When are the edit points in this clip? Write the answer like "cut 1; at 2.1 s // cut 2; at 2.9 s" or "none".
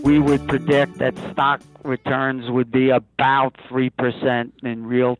cut 1; at 0.9 s